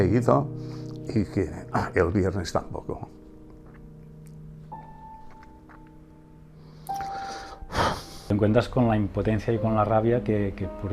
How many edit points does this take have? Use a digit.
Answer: 1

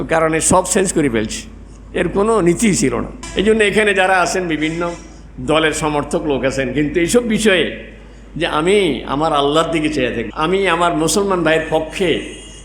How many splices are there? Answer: 2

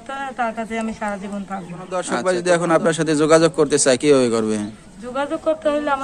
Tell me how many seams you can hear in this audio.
1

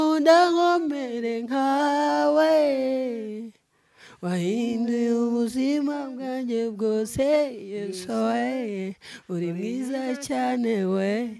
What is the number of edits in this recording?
0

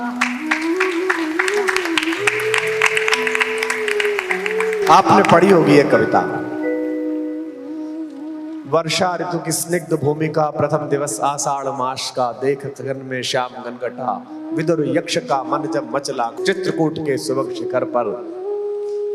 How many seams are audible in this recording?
0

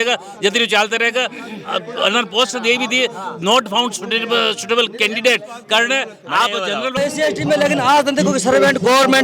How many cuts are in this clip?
1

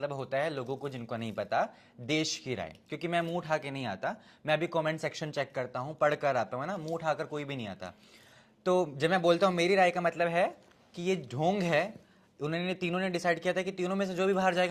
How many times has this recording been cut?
0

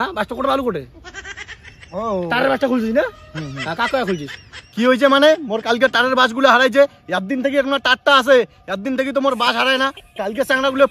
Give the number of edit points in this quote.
1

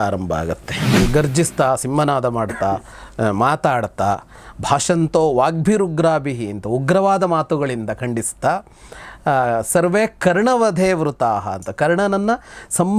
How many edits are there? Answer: 1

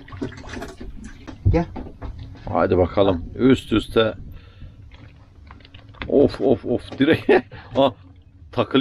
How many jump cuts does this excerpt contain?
1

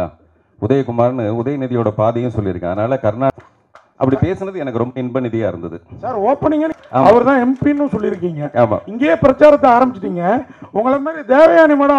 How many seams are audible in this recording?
2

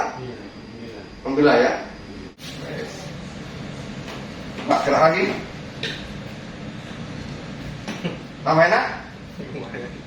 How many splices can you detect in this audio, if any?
1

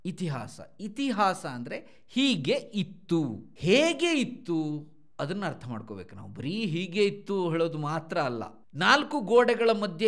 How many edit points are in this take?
2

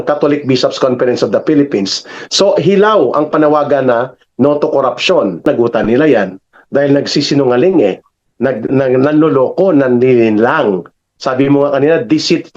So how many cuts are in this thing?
1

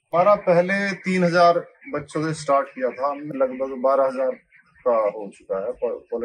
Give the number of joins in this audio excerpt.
1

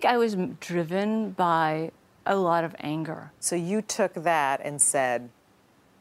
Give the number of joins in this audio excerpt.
1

